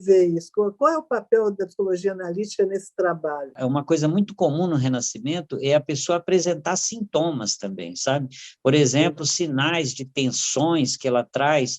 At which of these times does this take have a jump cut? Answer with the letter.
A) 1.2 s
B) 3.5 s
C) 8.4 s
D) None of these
B